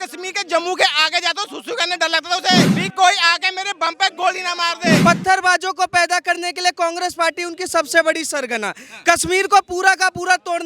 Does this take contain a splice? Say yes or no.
yes